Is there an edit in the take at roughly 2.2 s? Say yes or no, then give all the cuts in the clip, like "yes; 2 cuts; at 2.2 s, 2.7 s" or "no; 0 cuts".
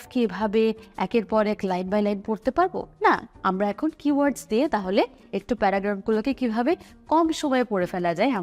no; 0 cuts